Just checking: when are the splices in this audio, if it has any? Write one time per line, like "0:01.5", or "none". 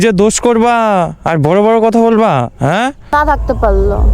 0:03.1